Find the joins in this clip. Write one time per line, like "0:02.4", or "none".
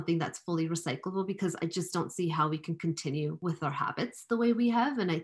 0:03.4

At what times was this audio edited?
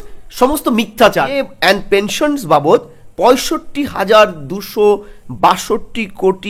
0:01.4

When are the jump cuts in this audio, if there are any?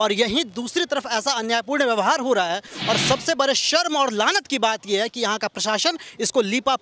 none

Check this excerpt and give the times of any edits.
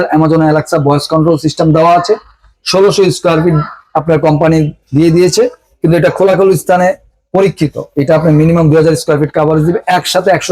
none

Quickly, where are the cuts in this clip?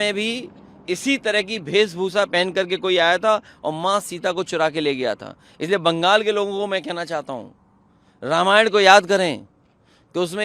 none

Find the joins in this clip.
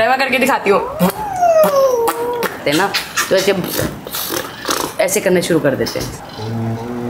0:02.6
0:06.0

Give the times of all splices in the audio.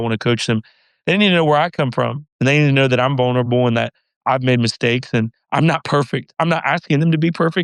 none

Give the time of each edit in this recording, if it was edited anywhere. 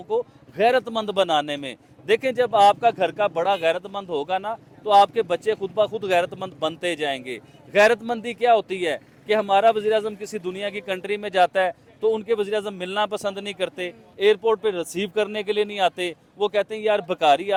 none

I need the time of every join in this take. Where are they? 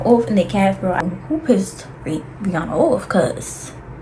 0:01.0

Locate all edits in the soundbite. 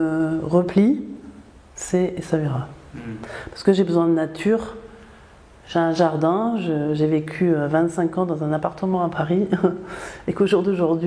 none

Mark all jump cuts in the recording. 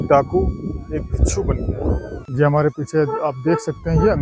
0:02.3

